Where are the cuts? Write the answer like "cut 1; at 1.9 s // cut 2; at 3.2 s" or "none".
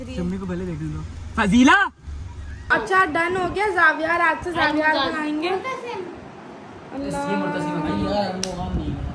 cut 1; at 2.7 s